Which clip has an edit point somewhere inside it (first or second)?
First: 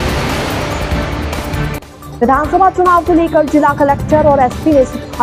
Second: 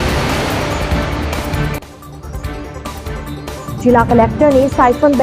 second